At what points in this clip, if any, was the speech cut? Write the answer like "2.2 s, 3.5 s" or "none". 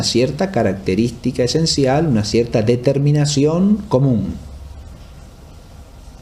none